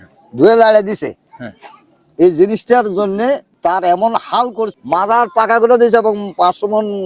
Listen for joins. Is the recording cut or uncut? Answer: cut